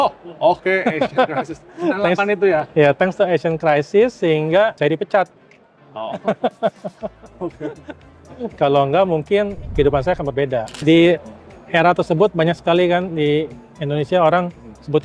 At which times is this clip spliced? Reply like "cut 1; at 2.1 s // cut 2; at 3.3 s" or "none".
cut 1; at 10.7 s